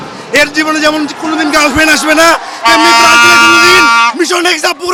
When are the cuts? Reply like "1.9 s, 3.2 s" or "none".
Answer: none